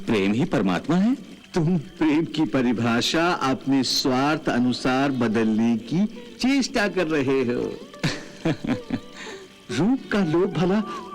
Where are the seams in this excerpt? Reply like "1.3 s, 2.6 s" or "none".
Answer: 1.4 s

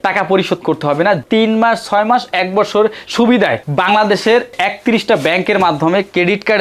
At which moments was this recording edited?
1.2 s

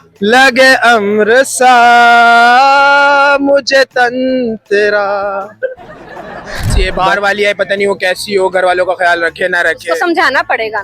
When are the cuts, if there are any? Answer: 6.7 s

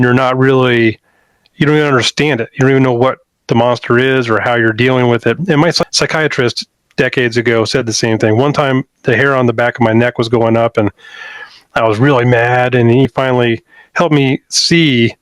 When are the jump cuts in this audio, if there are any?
5.8 s, 13.1 s

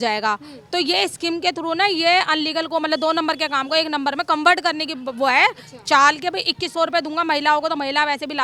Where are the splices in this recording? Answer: none

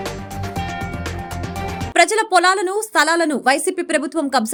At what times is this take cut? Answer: none

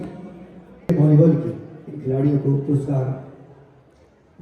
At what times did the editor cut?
0.9 s

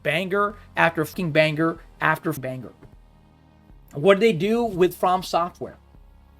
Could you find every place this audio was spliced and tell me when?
1.1 s, 2.4 s

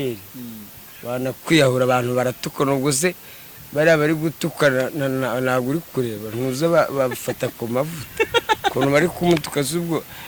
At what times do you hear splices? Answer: none

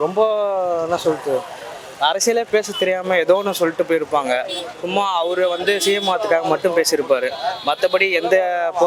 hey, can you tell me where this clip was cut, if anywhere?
none

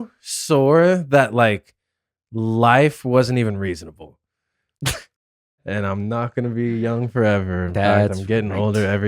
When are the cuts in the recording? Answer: 5.6 s

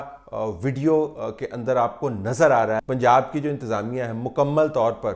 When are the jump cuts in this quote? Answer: 2.8 s

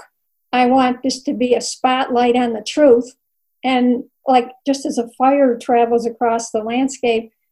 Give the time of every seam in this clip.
none

